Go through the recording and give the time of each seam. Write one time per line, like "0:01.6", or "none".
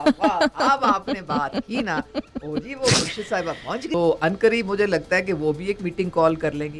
0:03.9